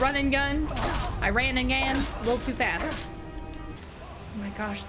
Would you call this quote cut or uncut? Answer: uncut